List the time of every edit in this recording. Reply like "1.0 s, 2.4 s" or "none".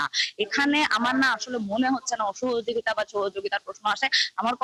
none